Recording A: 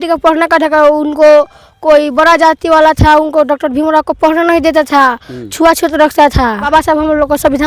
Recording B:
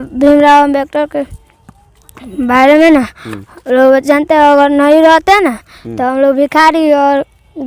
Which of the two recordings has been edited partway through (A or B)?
A